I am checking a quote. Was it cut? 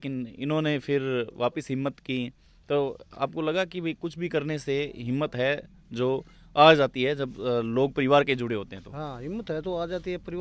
no; 0 cuts

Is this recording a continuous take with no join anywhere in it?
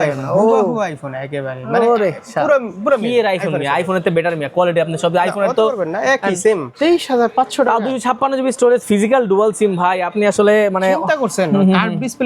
no; 1 cut; at 6.7 s

